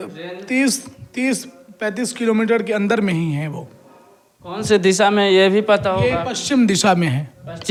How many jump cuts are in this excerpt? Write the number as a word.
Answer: zero